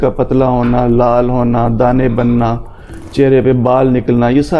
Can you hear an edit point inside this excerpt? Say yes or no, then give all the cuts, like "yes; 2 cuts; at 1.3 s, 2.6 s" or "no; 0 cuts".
no; 0 cuts